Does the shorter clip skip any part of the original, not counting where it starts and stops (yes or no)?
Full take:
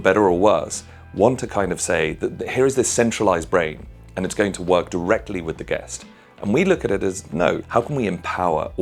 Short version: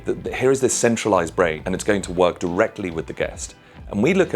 yes